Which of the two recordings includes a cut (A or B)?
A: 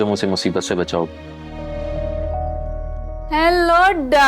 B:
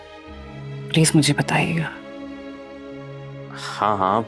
A